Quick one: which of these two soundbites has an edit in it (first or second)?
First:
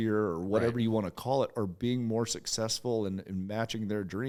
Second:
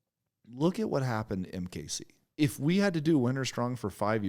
second